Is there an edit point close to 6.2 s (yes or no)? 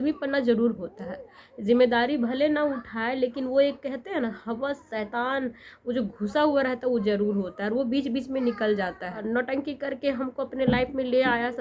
no